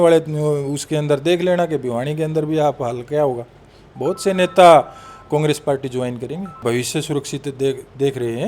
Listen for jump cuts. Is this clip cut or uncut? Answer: cut